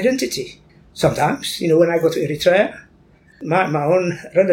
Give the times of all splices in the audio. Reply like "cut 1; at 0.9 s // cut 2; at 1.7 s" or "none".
cut 1; at 3.4 s